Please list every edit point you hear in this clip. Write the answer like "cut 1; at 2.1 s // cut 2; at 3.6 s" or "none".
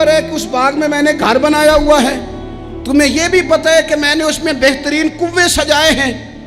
none